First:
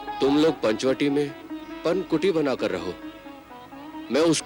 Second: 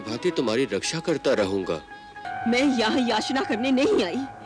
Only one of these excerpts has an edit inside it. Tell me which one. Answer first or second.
second